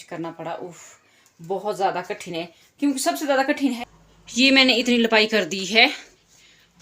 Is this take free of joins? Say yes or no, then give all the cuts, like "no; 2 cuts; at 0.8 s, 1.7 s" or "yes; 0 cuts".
no; 1 cut; at 3.8 s